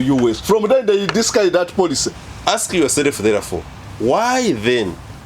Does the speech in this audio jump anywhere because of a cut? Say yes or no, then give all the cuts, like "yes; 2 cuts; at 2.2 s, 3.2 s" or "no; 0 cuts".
yes; 1 cut; at 2.2 s